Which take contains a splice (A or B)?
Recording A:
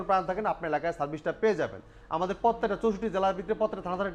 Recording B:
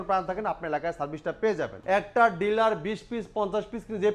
B